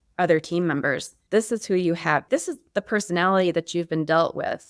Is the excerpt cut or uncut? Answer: cut